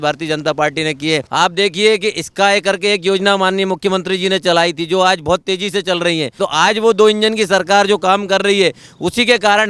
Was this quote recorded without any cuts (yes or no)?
no